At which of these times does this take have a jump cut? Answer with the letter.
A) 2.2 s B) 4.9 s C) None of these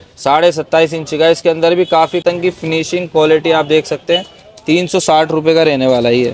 A